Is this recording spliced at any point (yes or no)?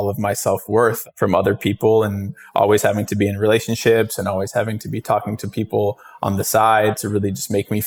yes